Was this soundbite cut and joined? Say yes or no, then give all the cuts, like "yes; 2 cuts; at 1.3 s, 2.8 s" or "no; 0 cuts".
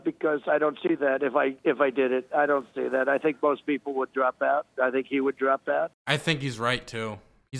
yes; 1 cut; at 6.0 s